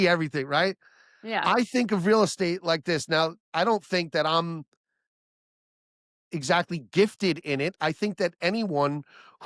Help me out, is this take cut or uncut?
uncut